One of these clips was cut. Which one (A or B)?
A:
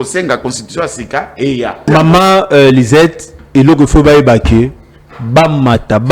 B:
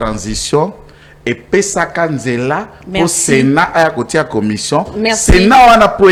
A